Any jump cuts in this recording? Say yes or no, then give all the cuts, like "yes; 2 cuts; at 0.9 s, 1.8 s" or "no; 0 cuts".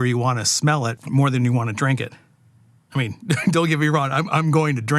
yes; 1 cut; at 1.0 s